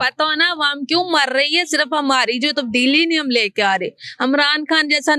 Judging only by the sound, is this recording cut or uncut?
uncut